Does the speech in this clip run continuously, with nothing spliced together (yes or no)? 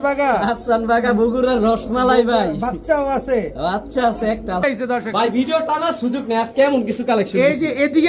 no